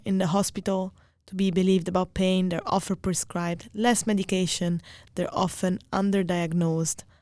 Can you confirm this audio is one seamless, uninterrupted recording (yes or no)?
yes